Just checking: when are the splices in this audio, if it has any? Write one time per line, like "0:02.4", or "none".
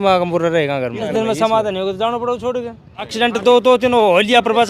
0:01.1
0:03.1